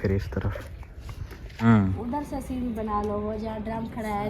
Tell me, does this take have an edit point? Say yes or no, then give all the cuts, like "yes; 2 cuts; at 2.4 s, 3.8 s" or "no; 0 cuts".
yes; 1 cut; at 1.6 s